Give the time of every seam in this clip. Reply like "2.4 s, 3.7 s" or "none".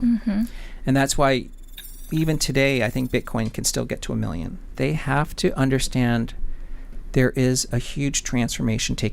4.7 s